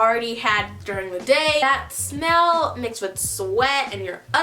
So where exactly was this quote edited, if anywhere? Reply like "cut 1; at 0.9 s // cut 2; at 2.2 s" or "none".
cut 1; at 1.6 s